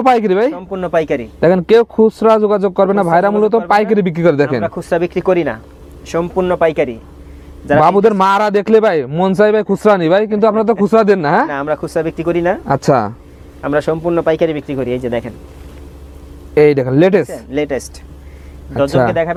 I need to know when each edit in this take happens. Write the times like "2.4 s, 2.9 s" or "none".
none